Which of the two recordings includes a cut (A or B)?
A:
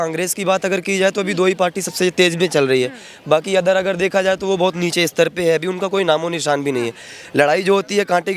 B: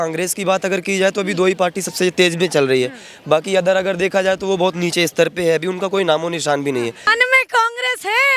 B